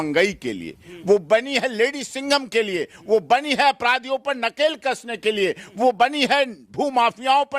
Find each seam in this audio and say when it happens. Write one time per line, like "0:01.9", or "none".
none